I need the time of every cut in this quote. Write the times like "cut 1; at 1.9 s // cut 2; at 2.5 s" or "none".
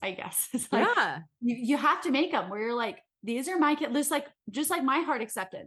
none